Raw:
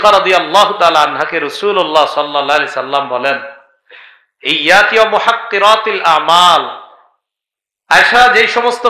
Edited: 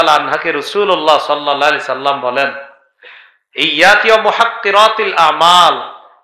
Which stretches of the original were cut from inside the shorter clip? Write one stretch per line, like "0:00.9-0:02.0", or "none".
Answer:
none